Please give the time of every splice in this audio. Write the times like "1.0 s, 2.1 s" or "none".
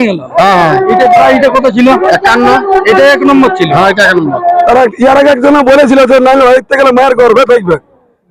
4.7 s